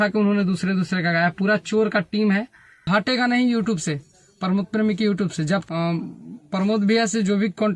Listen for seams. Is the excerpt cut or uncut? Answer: cut